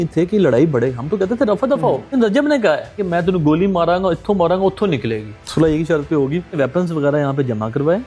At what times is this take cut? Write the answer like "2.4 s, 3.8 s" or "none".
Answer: 2.1 s, 5.4 s